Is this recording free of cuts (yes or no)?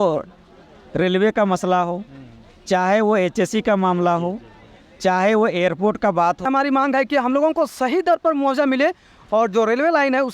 no